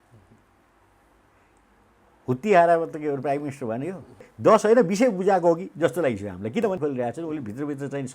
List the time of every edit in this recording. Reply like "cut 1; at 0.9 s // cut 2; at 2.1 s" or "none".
cut 1; at 4.3 s // cut 2; at 6.8 s